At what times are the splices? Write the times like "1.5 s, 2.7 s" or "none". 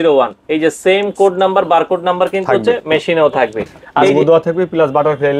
3.8 s